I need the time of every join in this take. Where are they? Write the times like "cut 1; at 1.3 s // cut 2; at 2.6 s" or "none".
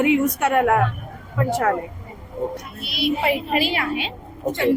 cut 1; at 2.5 s